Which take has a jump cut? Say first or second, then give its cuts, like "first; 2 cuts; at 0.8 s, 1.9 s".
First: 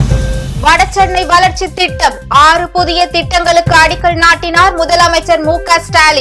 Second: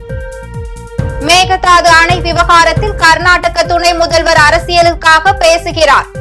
second; 1 cut; at 1.2 s